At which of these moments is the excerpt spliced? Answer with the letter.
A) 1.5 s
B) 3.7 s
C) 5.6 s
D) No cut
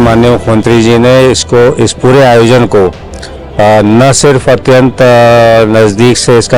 D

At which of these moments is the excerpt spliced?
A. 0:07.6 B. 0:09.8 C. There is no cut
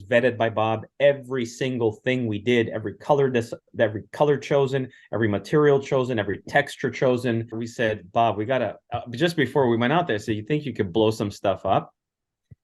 A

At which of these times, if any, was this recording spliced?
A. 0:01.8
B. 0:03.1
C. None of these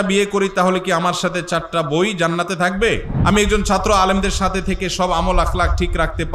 B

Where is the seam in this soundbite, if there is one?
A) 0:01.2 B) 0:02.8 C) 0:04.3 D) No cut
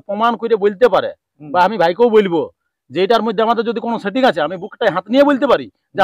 D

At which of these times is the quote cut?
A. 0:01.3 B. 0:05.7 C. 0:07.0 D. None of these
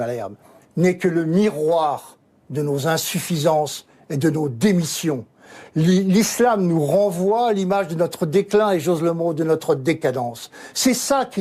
D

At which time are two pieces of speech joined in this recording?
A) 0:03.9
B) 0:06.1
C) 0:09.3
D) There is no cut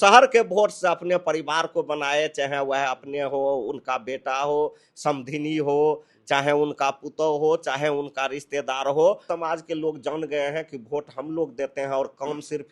C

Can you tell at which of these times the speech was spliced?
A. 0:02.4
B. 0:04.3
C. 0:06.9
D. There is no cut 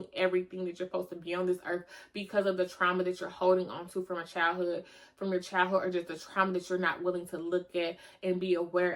D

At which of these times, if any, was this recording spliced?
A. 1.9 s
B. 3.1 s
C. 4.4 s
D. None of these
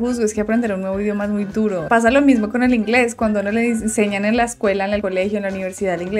D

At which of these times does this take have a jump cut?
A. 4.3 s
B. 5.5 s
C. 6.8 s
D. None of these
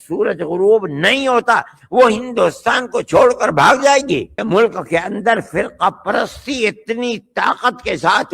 A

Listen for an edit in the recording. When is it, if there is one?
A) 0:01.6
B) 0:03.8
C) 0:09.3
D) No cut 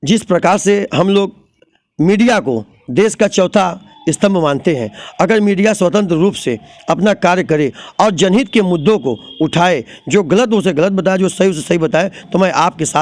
D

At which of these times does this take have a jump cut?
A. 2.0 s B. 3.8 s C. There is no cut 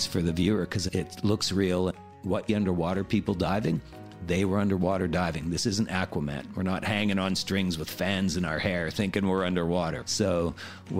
A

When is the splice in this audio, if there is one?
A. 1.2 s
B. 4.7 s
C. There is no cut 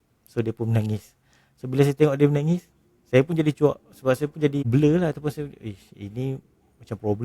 B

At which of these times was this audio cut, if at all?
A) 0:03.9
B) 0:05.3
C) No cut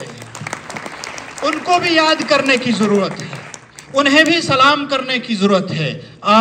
C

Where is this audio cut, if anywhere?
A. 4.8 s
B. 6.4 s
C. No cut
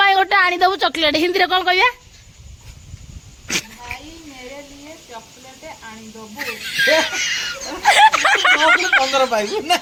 C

